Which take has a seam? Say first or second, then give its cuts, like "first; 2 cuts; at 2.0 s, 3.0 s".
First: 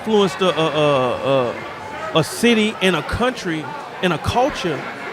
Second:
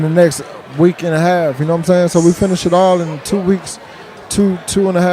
first; 1 cut; at 3.0 s